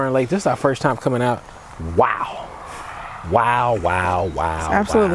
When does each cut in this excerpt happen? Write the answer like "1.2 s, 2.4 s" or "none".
none